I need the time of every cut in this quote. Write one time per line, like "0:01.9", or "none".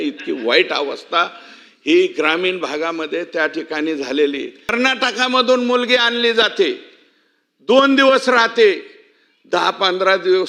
0:04.7